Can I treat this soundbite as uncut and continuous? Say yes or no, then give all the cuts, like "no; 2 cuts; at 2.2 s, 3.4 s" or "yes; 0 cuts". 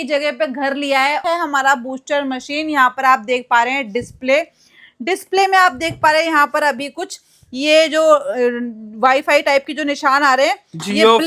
no; 1 cut; at 1.2 s